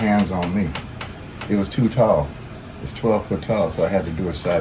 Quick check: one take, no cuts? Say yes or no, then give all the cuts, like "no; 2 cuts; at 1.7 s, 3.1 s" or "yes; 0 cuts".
yes; 0 cuts